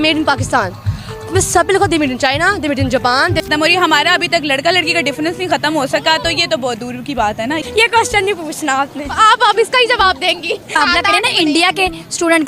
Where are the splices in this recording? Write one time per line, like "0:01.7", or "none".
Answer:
0:03.5
0:07.7
0:10.7